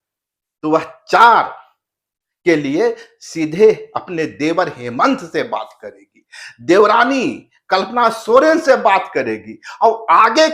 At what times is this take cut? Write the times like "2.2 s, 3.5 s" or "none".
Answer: none